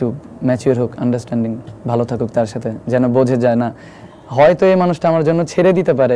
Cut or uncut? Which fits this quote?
uncut